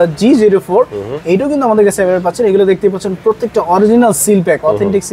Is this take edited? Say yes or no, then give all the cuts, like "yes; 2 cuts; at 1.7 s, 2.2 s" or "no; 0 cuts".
no; 0 cuts